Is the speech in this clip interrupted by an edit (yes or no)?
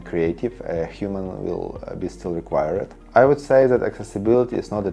yes